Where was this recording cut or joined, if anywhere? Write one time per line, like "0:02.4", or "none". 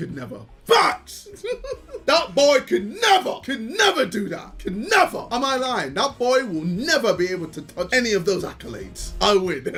none